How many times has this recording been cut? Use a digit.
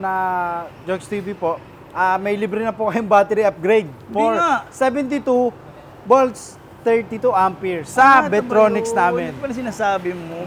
0